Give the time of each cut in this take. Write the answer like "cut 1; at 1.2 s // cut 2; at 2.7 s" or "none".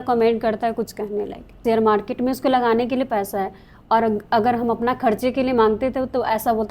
cut 1; at 1.6 s